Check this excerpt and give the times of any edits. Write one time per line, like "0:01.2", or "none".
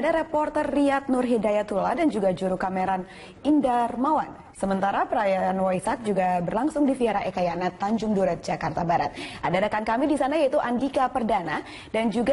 none